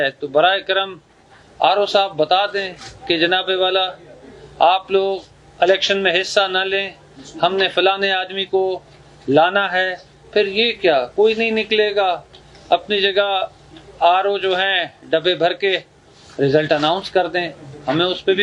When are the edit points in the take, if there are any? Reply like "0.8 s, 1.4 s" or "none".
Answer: none